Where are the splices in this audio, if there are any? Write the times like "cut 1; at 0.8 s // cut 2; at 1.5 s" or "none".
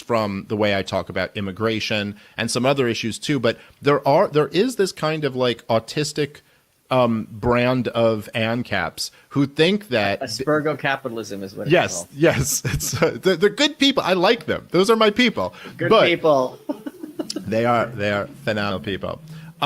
cut 1; at 3.7 s // cut 2; at 11.7 s

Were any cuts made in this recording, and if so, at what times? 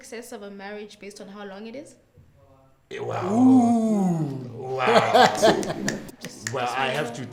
none

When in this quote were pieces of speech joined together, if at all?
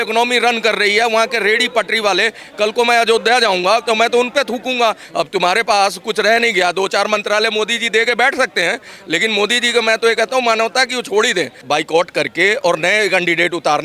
cut 1; at 5.0 s // cut 2; at 11.6 s

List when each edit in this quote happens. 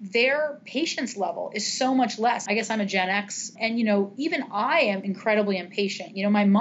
cut 1; at 2.4 s // cut 2; at 3.5 s // cut 3; at 5.1 s

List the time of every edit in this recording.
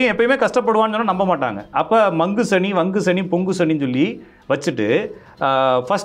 none

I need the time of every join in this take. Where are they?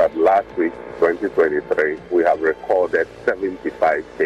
cut 1; at 2.0 s // cut 2; at 3.1 s

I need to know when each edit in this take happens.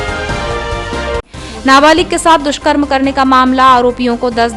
cut 1; at 1.2 s

